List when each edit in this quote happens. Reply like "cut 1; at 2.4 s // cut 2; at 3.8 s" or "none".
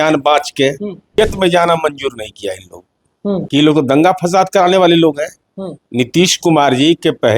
cut 1; at 1.1 s // cut 2; at 3.4 s